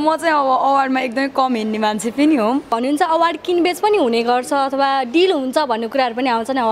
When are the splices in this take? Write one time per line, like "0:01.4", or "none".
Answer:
0:02.7